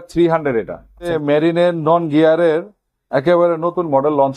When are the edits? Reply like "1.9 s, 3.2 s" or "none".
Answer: 1.1 s